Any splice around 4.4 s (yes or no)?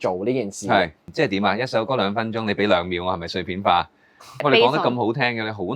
yes